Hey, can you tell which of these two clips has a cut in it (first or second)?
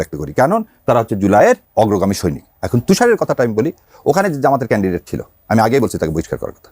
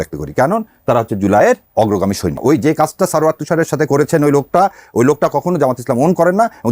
second